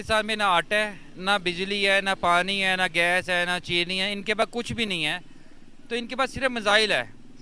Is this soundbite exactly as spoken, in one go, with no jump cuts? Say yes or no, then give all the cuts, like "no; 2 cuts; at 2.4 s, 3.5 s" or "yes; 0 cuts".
yes; 0 cuts